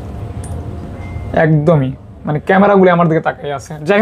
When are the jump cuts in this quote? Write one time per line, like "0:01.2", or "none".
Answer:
none